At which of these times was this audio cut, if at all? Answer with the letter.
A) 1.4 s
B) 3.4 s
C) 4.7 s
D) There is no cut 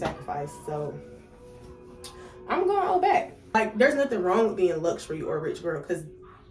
B